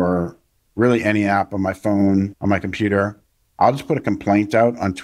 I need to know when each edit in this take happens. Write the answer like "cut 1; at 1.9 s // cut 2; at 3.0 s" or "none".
cut 1; at 2.3 s